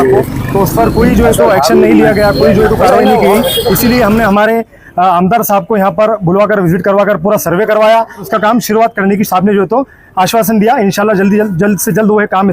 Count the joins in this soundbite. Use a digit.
1